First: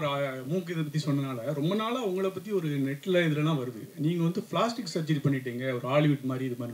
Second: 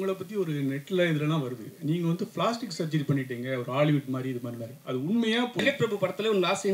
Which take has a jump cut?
second; 1 cut; at 5.6 s

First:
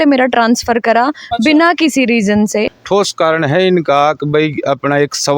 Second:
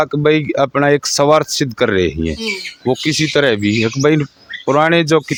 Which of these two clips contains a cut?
first; 1 cut; at 2.8 s

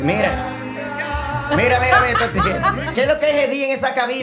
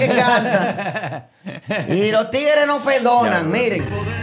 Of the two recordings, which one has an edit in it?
first; 1 cut; at 2.9 s

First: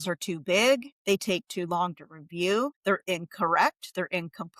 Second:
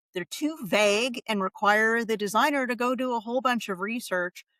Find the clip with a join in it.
first; 2 cuts; at 0.9 s, 2.8 s

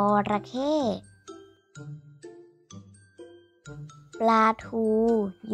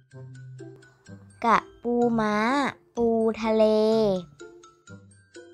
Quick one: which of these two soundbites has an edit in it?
second; 2 cuts; at 1.1 s, 4.6 s

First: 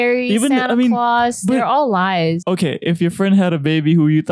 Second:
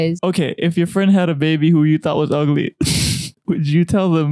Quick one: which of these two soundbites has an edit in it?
second; 1 cut; at 3.3 s

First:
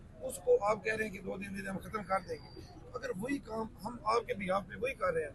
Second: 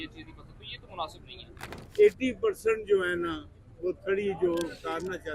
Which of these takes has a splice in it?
second; 1 cut; at 1.8 s

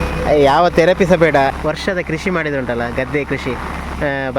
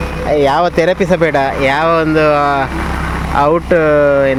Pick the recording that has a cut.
first; 1 cut; at 1.5 s

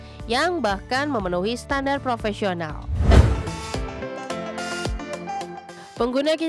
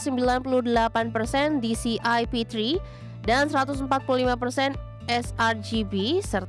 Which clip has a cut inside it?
first; 1 cut; at 3.1 s

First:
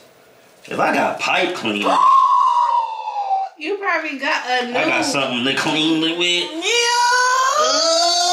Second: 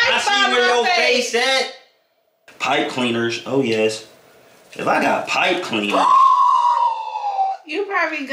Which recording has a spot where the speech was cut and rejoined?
second; 1 cut; at 2.4 s

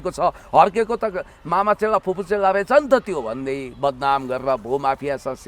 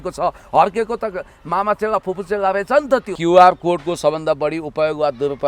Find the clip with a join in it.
second; 1 cut; at 3.1 s

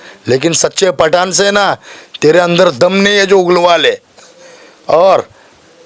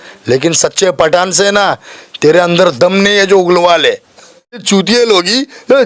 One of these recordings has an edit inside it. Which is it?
second; 1 cut; at 4.6 s

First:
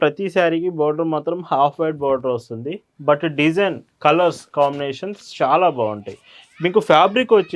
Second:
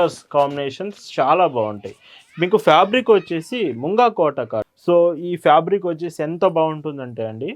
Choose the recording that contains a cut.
second; 1 cut; at 4.7 s

